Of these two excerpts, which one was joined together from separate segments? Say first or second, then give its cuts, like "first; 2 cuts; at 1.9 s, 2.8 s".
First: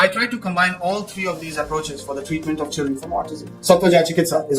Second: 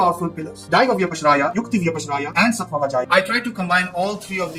first; 1 cut; at 2.9 s